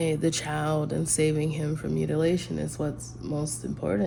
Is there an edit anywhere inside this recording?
no; 0 cuts

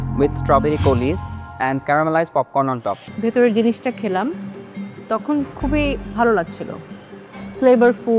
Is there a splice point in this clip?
yes; 1 cut; at 3.0 s

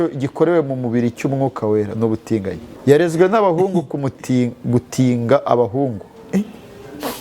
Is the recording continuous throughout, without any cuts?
no; 1 cut; at 2.7 s

